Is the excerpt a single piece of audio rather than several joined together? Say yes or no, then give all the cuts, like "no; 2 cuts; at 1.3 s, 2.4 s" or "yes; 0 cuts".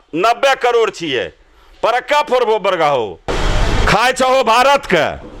yes; 0 cuts